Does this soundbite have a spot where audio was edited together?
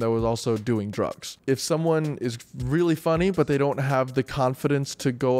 yes; 1 cut; at 1.3 s

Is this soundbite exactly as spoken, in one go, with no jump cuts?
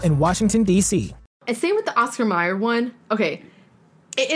no; 1 cut; at 1.4 s

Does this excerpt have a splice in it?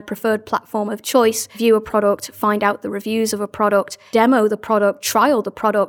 yes; 2 cuts; at 1.5 s, 4.0 s

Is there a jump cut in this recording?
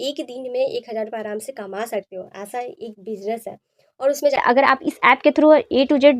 yes; 1 cut; at 4.4 s

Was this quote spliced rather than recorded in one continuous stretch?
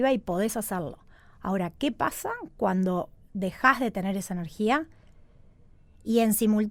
no; 0 cuts

